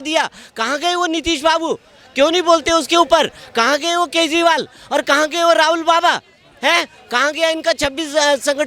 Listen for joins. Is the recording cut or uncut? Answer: uncut